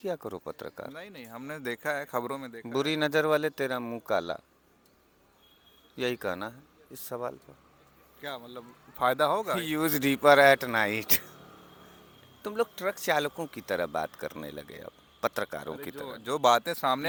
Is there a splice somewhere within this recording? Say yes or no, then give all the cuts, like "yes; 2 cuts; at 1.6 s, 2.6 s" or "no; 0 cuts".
no; 0 cuts